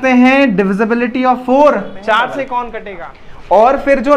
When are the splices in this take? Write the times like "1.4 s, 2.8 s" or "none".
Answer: 2.8 s